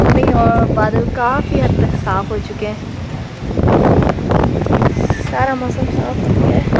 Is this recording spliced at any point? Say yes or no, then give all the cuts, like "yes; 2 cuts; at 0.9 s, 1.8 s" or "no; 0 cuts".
no; 0 cuts